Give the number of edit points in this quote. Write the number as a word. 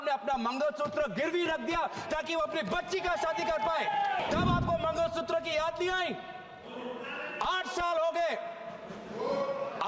one